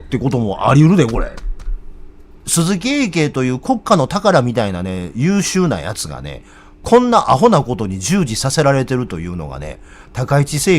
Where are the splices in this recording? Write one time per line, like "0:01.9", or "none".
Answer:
0:02.5